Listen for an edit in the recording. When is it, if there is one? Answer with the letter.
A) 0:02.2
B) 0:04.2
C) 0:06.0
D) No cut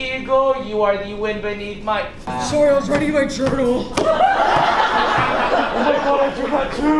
A